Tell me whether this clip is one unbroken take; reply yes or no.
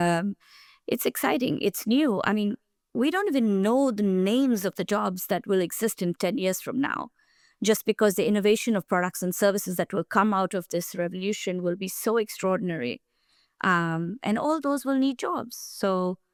yes